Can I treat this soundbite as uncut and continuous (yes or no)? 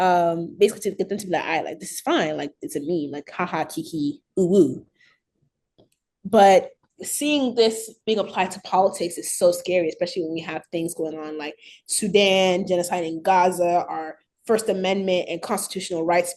yes